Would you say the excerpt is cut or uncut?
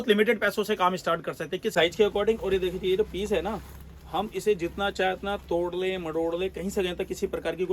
cut